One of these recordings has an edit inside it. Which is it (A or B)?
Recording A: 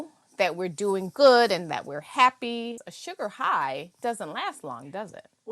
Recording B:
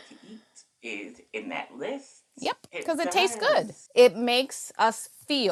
A